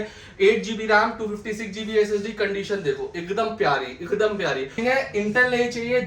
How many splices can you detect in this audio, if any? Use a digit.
1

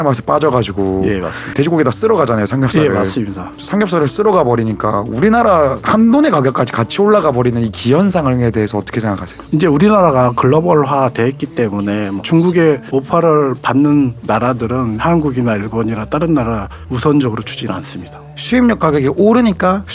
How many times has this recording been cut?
6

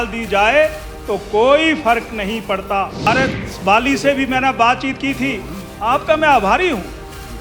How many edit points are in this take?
1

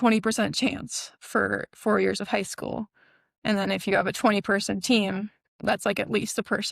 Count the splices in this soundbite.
1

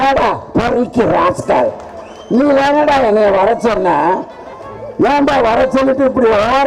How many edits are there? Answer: 0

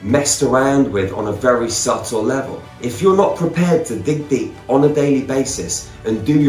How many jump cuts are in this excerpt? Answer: 1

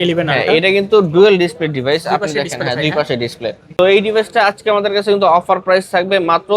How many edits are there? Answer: 1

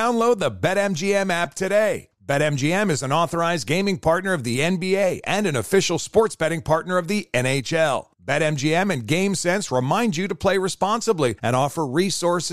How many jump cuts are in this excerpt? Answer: 0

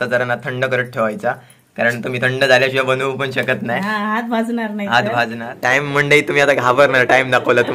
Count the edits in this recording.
1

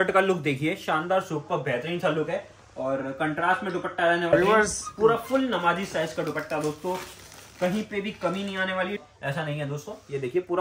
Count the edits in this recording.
2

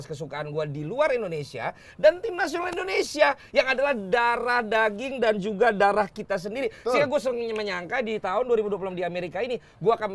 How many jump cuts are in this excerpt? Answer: 0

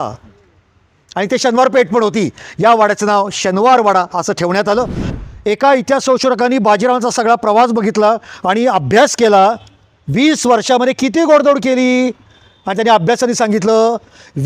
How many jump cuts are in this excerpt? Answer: 1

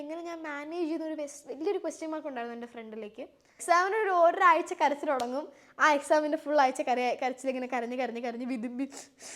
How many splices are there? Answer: 1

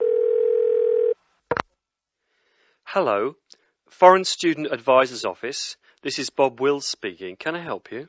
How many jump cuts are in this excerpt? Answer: 1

